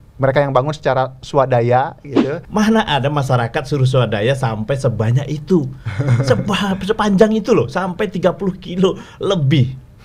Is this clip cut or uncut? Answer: cut